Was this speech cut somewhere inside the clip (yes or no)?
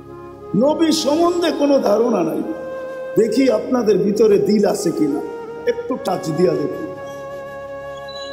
no